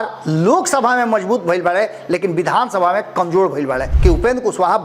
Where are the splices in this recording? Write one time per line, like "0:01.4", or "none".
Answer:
0:03.9